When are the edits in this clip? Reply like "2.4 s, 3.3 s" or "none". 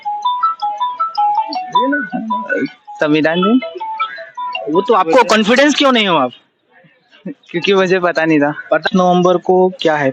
8.9 s